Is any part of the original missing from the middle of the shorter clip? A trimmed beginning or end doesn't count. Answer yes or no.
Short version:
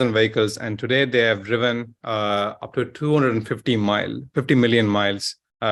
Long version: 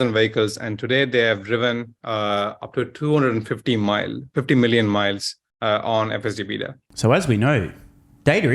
no